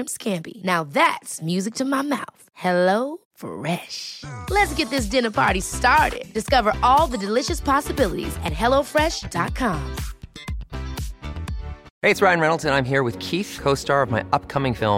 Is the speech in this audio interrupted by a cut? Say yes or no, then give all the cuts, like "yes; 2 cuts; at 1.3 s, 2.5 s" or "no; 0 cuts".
yes; 1 cut; at 11.9 s